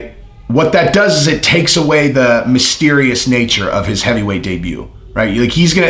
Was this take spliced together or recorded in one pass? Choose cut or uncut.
uncut